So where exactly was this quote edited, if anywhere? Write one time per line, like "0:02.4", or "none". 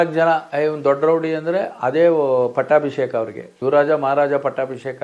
none